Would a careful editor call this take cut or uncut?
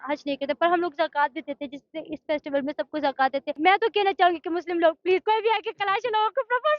cut